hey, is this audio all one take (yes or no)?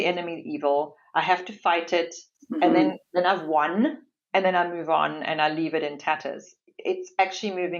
yes